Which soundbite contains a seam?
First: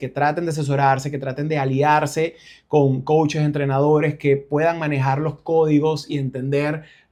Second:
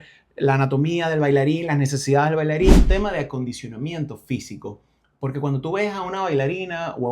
second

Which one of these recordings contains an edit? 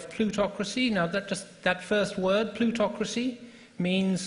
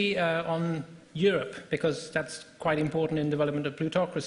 second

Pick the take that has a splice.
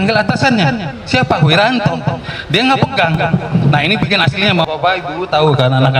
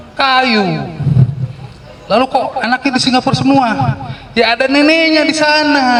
first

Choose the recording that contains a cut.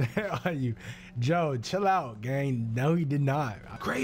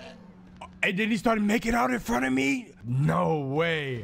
second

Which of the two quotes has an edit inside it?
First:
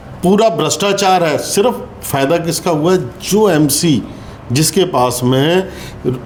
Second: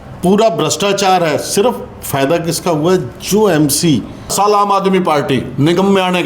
second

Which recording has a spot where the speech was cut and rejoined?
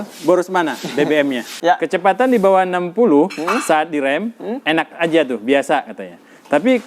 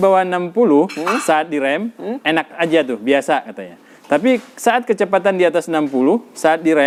first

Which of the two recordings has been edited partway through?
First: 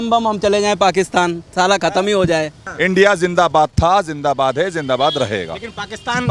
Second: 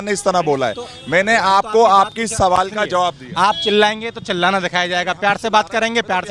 first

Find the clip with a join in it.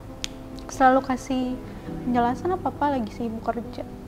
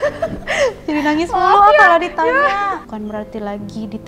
second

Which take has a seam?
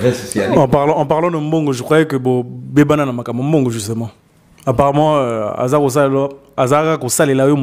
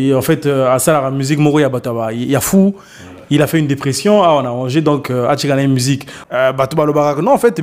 second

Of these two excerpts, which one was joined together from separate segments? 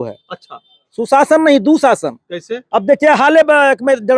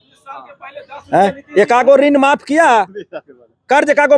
first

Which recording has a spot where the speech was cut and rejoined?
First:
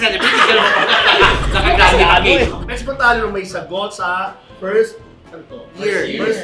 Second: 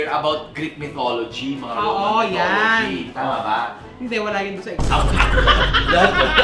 first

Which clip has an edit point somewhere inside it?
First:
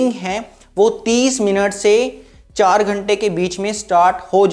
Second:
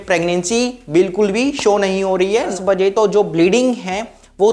second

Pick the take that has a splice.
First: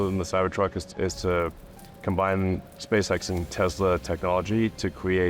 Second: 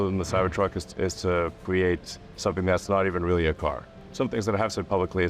second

